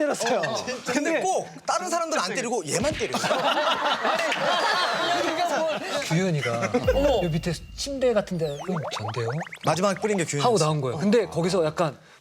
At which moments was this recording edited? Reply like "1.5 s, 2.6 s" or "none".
6.0 s, 8.6 s